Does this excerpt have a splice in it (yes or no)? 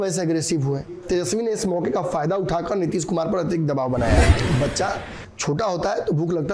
yes